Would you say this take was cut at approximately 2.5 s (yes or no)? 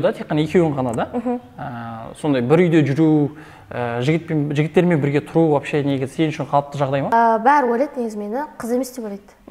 no